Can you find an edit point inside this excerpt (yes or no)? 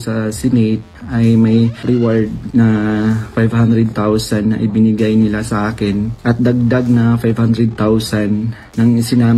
yes